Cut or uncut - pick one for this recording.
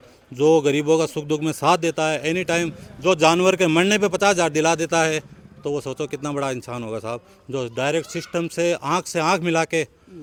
uncut